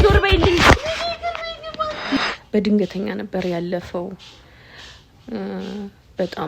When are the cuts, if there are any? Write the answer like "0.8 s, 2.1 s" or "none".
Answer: 2.4 s

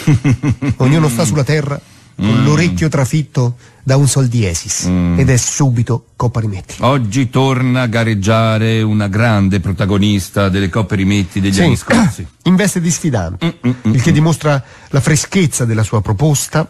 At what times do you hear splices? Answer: none

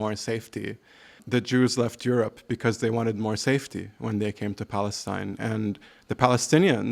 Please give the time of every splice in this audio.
1.2 s

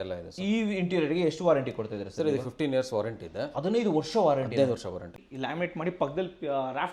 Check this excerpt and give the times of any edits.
5.2 s

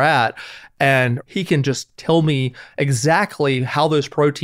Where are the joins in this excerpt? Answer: 1.2 s

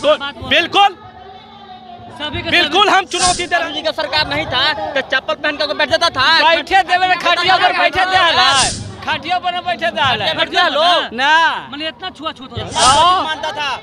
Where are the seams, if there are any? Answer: 3.7 s

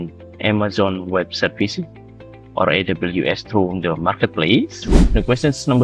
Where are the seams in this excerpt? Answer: 4.9 s

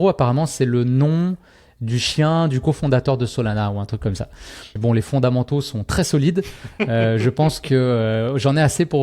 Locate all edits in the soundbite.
4.7 s

